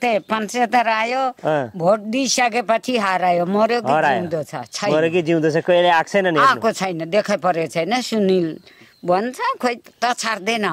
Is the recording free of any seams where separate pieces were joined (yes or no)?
no